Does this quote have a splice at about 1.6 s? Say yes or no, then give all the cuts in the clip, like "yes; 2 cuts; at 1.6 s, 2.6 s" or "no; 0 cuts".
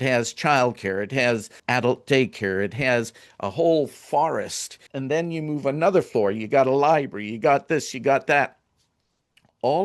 yes; 2 cuts; at 1.6 s, 4.9 s